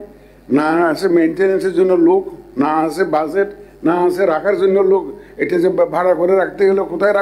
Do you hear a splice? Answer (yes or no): no